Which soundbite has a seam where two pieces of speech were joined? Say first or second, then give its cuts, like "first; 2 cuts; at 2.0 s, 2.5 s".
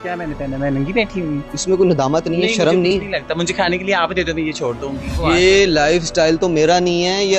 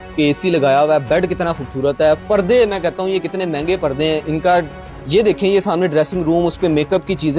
first; 2 cuts; at 1.5 s, 5.2 s